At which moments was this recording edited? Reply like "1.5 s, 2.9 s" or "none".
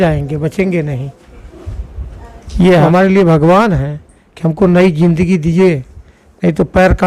2.8 s